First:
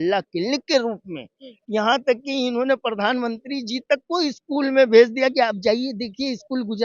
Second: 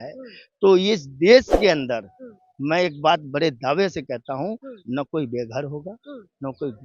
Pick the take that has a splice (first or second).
first